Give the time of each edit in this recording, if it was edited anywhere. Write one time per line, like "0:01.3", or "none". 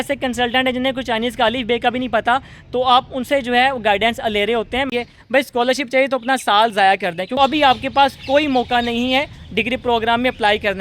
0:04.9
0:07.3